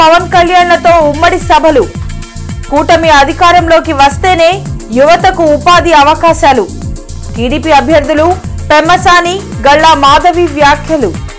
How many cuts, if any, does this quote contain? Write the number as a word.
zero